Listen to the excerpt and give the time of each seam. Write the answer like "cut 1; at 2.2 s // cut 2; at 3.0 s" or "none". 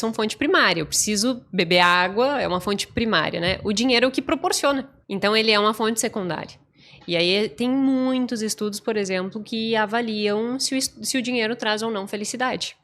cut 1; at 5.0 s